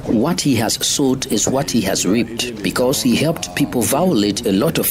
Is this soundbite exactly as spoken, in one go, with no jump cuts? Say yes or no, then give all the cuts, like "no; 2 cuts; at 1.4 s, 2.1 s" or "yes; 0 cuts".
yes; 0 cuts